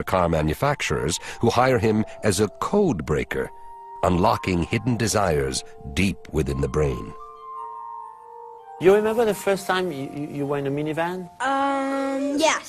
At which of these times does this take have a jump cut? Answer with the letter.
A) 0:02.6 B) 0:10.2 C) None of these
B